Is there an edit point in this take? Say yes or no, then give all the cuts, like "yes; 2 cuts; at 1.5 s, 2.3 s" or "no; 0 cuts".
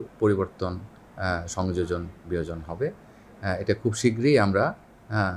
no; 0 cuts